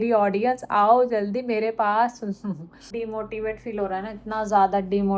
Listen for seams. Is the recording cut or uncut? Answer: cut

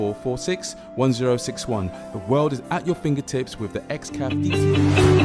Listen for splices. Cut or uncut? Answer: cut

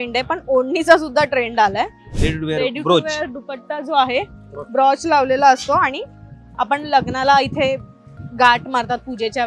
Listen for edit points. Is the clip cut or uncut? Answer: cut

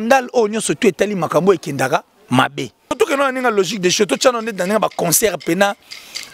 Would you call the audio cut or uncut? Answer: cut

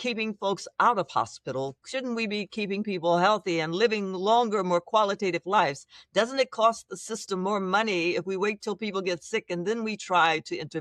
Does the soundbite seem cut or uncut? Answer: uncut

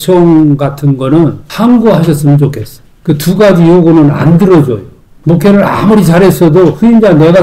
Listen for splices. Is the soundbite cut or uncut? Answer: uncut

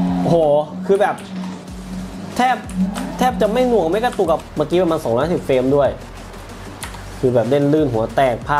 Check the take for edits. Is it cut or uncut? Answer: cut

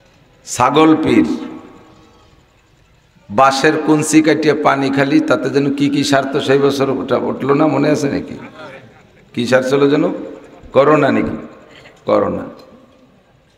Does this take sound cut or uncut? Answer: uncut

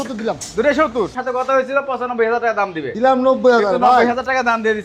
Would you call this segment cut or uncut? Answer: cut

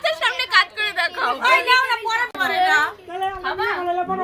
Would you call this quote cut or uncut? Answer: cut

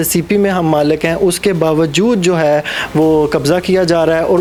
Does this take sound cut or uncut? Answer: uncut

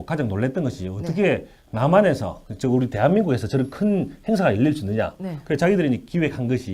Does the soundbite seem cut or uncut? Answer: uncut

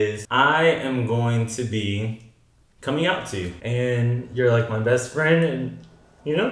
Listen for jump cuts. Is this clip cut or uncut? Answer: cut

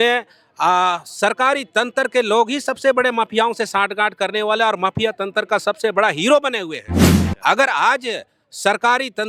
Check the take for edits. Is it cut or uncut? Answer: uncut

